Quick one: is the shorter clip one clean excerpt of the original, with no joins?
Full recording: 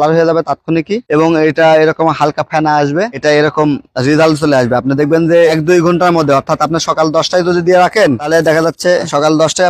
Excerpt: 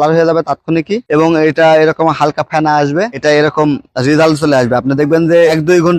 yes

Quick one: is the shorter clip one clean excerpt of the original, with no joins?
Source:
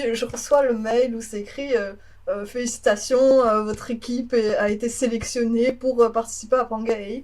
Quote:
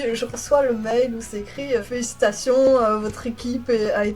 no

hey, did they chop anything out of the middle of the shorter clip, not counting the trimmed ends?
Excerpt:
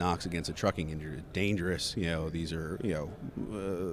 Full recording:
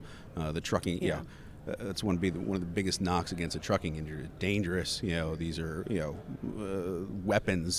no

